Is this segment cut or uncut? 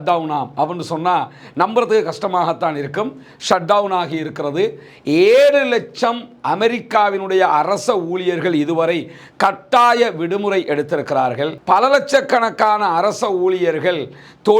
uncut